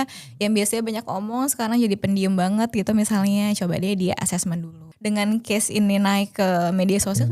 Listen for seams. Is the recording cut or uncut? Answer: cut